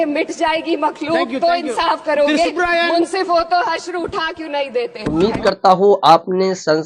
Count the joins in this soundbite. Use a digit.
0